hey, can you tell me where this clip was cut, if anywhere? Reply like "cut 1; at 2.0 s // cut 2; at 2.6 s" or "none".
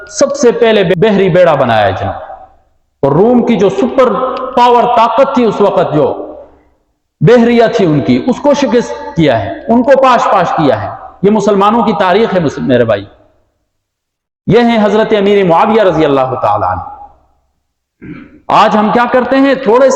cut 1; at 0.9 s